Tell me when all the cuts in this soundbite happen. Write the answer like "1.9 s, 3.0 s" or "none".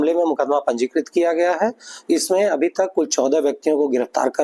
2.2 s